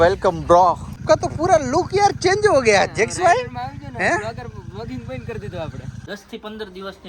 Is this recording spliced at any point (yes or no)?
yes